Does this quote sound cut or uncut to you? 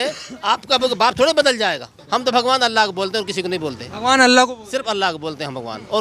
cut